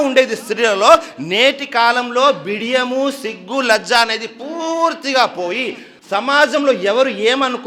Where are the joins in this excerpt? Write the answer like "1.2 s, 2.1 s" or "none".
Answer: none